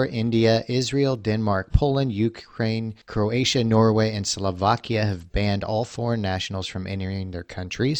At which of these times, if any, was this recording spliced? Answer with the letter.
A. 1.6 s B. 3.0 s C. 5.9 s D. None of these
B